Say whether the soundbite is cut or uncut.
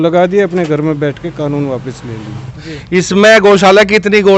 cut